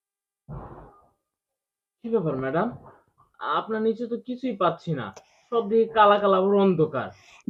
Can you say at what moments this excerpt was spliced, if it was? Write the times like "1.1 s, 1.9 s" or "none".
none